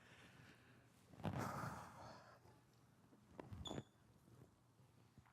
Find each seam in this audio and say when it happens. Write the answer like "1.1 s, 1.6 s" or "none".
3.3 s